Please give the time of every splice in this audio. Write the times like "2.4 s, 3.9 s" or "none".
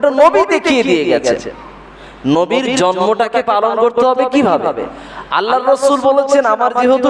none

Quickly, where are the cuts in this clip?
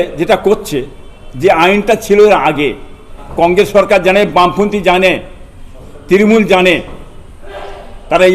3.2 s

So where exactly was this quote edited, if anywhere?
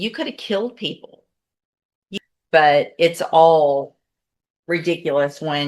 2.0 s

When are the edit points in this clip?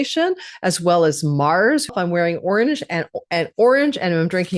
1.9 s

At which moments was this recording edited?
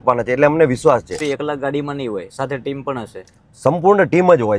1.2 s

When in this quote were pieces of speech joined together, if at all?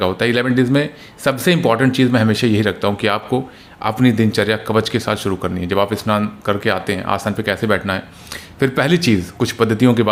none

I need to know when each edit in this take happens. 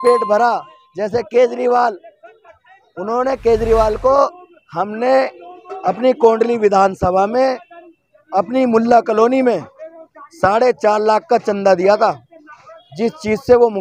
none

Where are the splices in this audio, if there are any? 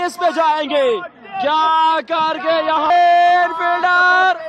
2.9 s

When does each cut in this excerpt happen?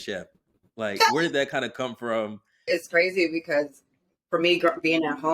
2.5 s

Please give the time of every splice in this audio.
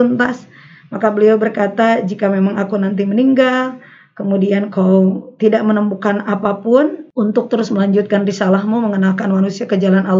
7.0 s

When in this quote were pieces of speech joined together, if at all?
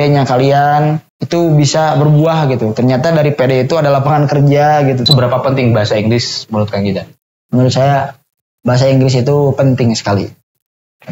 1.1 s, 5.0 s

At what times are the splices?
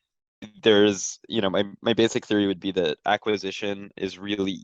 none

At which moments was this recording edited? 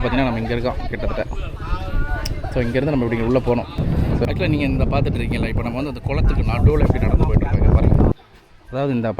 3.8 s, 8.1 s

